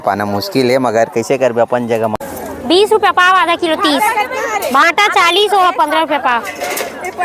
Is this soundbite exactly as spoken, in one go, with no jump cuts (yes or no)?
no